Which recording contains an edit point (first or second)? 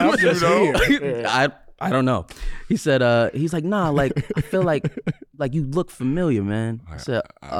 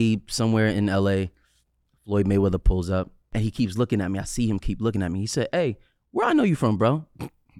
second